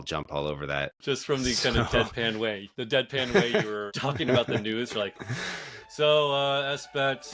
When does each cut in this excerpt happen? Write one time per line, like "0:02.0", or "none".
0:01.0
0:02.7
0:03.9